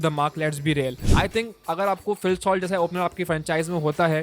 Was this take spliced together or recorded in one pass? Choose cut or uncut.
cut